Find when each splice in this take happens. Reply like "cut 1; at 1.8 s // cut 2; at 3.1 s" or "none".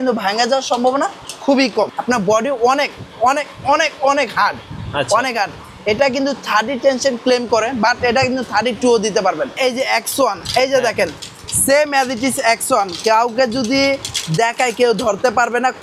cut 1; at 1.9 s // cut 2; at 9.5 s